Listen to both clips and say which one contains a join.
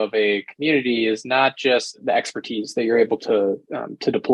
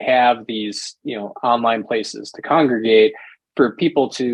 first; 1 cut; at 2.0 s

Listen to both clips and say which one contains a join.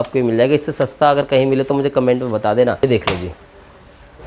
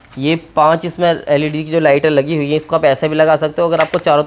first; 1 cut; at 2.8 s

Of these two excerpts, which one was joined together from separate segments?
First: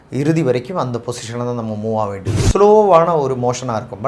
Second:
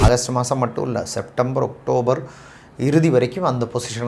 first; 1 cut; at 2.4 s

